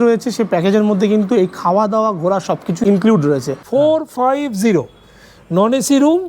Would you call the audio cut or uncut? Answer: cut